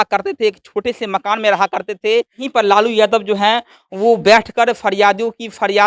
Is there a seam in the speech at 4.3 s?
no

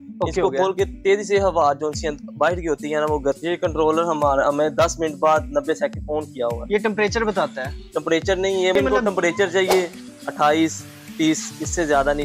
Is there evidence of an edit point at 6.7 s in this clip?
no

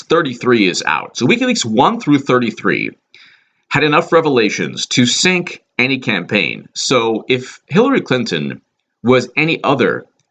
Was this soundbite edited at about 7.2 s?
yes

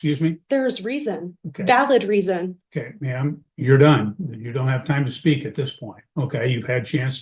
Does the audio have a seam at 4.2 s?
no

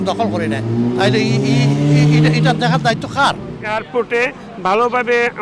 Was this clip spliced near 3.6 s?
yes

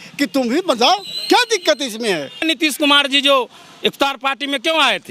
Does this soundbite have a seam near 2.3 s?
yes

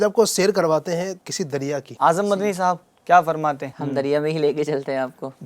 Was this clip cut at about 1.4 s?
yes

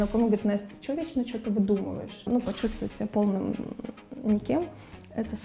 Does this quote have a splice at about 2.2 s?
yes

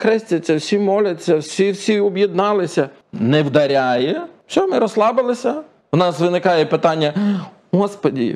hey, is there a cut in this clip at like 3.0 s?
yes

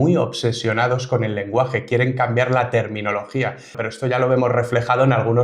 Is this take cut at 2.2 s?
no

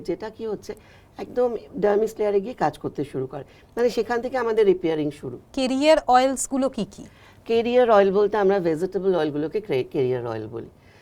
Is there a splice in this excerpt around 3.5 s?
no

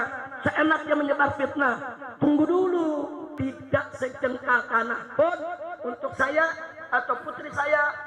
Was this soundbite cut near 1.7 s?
no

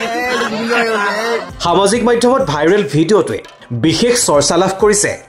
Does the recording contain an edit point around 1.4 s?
yes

